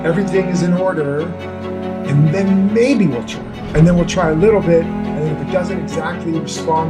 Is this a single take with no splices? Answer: yes; 0 cuts

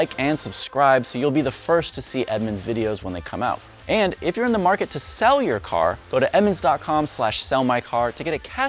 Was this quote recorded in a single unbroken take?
yes; 0 cuts

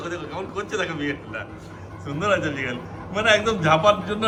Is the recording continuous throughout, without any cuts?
yes; 0 cuts

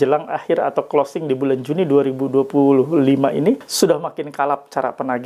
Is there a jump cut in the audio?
yes; 1 cut; at 3.7 s

